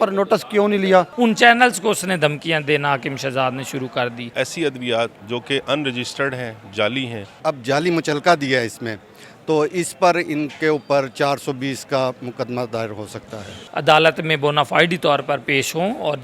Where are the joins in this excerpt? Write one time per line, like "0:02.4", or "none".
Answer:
0:01.1
0:04.3
0:07.4
0:13.5